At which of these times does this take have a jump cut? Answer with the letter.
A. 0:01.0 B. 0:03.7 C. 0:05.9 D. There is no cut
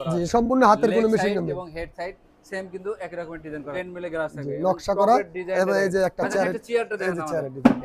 B